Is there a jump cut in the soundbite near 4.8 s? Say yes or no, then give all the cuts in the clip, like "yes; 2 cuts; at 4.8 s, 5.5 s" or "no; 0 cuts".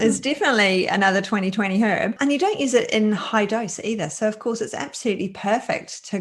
no; 0 cuts